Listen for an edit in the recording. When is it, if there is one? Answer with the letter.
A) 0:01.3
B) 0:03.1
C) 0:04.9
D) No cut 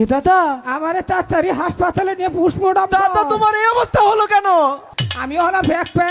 C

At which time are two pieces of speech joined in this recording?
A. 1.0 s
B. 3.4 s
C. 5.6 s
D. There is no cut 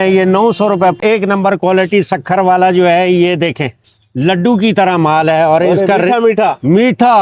A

